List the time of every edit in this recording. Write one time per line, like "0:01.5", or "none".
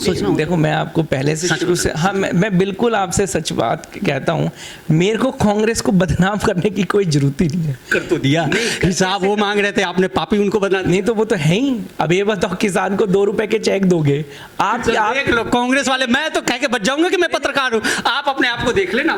none